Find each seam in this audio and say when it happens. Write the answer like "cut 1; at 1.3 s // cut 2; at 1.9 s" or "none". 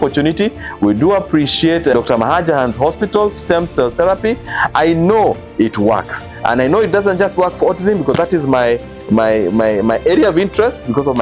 none

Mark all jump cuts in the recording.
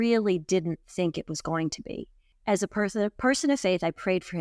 cut 1; at 2.3 s

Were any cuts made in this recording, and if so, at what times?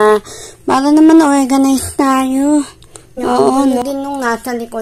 cut 1; at 3.8 s

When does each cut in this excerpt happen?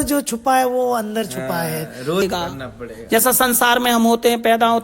cut 1; at 2.2 s

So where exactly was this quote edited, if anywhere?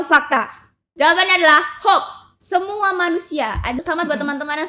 cut 1; at 3.8 s

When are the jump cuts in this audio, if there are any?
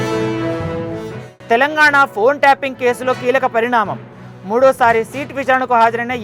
cut 1; at 1.1 s

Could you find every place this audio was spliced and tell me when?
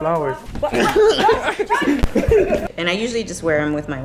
cut 1; at 2.6 s

